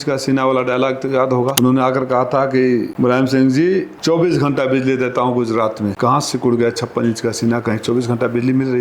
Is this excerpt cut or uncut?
cut